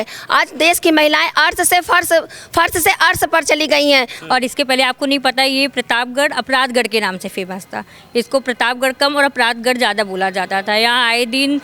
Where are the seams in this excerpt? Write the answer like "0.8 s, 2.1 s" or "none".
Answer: 4.2 s